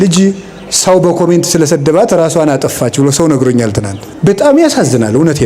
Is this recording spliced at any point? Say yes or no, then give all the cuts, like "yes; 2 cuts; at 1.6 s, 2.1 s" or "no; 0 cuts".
yes; 1 cut; at 4.0 s